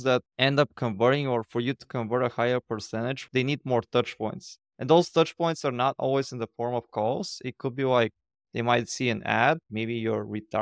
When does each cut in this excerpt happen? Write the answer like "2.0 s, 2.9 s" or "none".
9.7 s

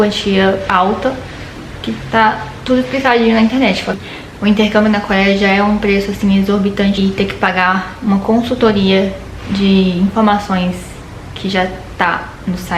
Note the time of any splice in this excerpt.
3.9 s, 7.0 s

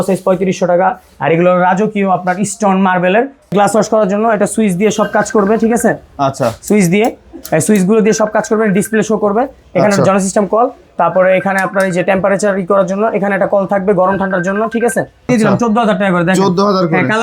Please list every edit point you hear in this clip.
3.5 s, 15.3 s

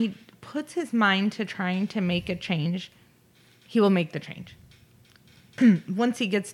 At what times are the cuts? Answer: 5.6 s

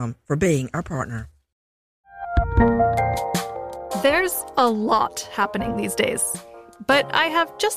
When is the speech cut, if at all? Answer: 2.0 s

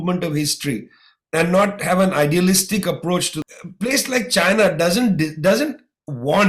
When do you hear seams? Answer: 3.4 s

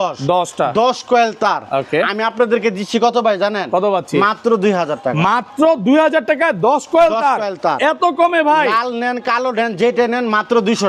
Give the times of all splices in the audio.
none

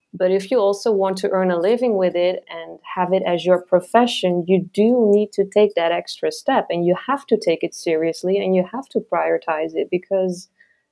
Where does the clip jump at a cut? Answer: none

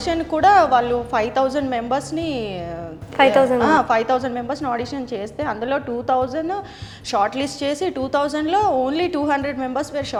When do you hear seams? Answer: none

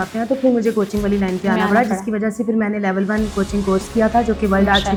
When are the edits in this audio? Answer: none

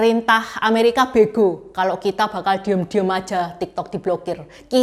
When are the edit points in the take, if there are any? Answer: none

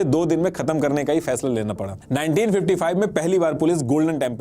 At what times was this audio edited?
2.0 s

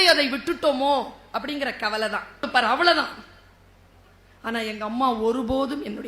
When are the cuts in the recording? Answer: 2.5 s

